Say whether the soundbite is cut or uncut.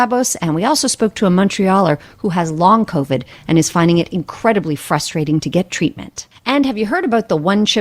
cut